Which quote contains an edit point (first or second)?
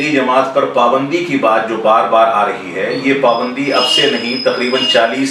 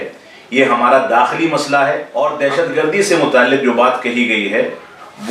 second